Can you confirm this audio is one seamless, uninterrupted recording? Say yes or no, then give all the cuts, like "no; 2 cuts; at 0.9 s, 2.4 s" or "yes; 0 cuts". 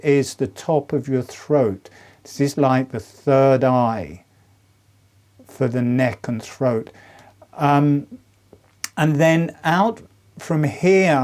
no; 1 cut; at 6.9 s